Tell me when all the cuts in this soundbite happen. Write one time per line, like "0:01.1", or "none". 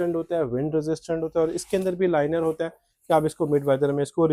none